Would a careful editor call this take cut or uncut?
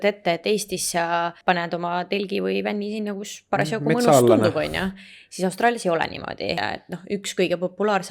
cut